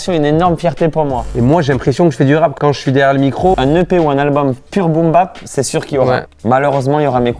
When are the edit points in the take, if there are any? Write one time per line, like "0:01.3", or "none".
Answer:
0:01.3
0:02.6
0:03.6
0:06.3